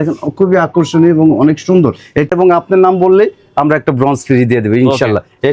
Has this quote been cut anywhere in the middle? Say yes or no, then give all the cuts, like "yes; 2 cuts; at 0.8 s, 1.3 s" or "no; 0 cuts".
yes; 1 cut; at 2.3 s